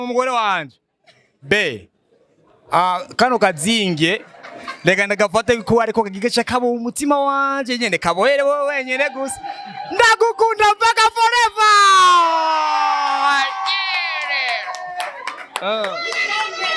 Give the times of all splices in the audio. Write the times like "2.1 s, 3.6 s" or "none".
none